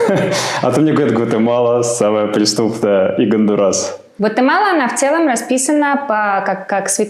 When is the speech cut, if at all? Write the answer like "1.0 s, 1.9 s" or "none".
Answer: 4.0 s